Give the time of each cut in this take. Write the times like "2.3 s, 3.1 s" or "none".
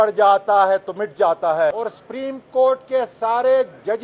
none

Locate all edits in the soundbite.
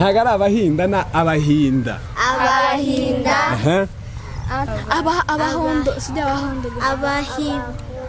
none

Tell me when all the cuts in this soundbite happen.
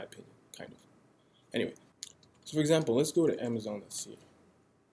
1.9 s

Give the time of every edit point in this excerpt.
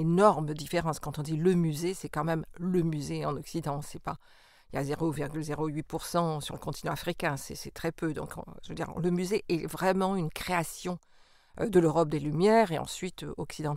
none

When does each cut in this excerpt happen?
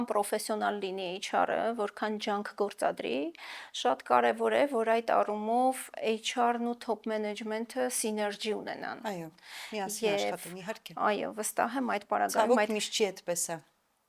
none

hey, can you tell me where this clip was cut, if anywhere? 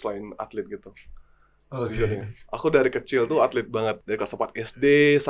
4.0 s

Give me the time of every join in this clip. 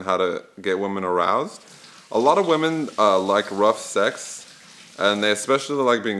none

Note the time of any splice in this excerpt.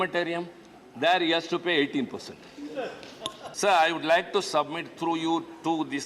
3.5 s

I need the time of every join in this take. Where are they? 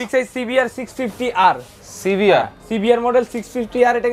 none

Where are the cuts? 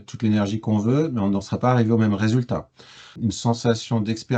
3.2 s

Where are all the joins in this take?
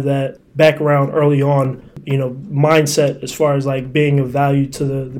2.0 s

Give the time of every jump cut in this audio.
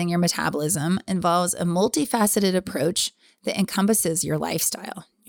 none

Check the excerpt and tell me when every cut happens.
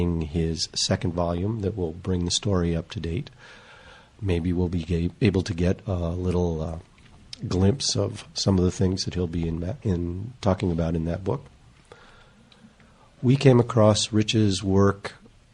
6.8 s

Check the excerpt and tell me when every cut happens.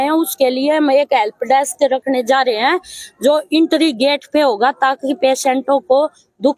none

